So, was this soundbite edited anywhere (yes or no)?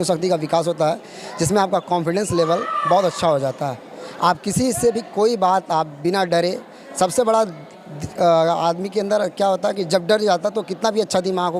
no